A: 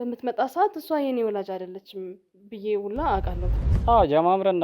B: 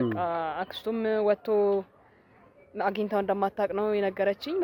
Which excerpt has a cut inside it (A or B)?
A